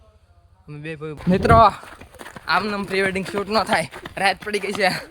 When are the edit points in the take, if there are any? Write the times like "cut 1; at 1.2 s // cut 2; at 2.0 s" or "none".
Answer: cut 1; at 1.2 s